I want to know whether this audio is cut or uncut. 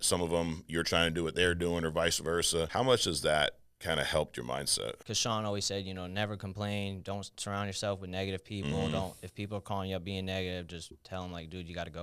cut